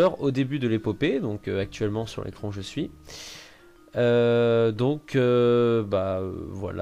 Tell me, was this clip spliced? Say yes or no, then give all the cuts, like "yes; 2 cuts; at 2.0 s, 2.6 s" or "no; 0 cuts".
no; 0 cuts